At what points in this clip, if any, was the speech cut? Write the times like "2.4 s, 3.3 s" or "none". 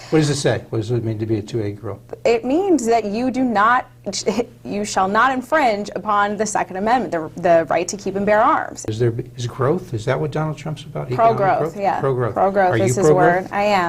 8.9 s